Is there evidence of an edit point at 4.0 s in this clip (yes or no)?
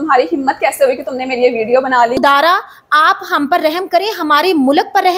no